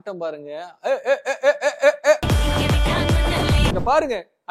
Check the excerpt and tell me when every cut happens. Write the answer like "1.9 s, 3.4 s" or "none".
2.3 s, 3.7 s